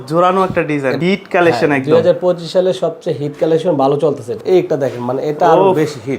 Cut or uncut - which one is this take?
cut